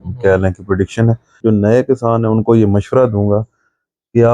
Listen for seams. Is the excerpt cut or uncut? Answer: cut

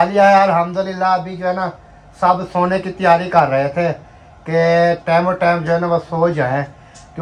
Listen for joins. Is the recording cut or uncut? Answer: uncut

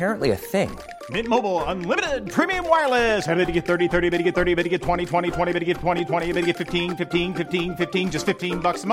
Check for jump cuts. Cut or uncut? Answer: uncut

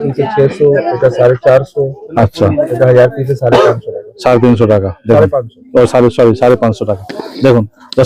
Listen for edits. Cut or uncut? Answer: uncut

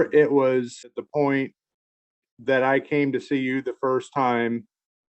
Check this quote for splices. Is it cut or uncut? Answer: cut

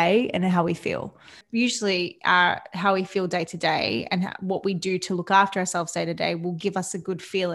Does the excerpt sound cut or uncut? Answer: cut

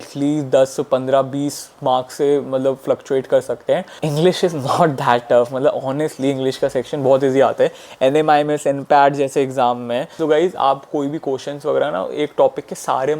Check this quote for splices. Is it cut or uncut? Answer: cut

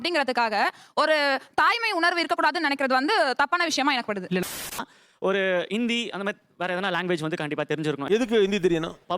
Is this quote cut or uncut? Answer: cut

